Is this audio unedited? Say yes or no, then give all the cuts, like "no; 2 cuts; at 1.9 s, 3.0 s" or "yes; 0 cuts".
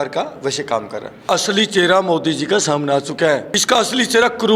no; 2 cuts; at 1.3 s, 3.5 s